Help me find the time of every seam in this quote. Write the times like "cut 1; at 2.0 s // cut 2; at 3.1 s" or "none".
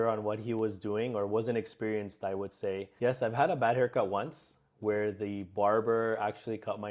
cut 1; at 2.9 s